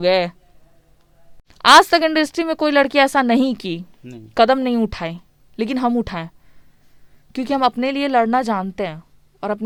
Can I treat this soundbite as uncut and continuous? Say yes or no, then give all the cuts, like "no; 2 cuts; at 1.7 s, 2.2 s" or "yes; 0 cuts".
yes; 0 cuts